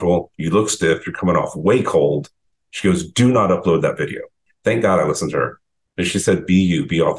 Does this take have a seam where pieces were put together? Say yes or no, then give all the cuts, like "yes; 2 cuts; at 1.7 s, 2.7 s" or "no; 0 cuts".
yes; 1 cut; at 4.4 s